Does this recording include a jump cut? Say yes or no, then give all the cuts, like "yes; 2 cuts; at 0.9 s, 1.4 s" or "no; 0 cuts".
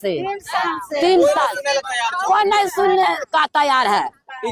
no; 0 cuts